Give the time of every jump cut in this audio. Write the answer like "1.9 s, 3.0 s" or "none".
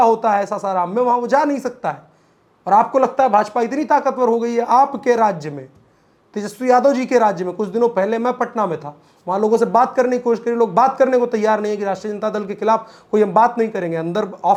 none